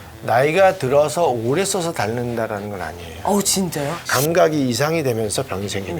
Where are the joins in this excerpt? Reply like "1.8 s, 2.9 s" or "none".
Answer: 4.0 s